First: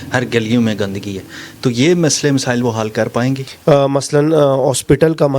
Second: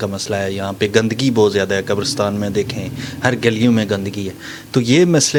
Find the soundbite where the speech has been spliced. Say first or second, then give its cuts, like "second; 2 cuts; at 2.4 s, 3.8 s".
first; 1 cut; at 3.5 s